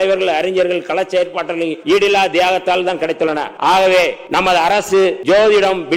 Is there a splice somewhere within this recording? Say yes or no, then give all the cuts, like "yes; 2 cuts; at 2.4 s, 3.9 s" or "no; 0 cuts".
yes; 4 cuts; at 1.8 s, 3.5 s, 4.2 s, 5.2 s